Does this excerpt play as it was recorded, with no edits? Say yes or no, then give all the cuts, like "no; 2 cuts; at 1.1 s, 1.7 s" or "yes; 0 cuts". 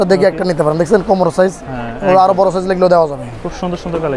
yes; 0 cuts